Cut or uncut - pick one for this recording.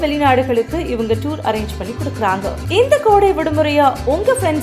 cut